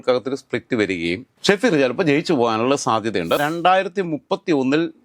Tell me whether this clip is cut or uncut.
cut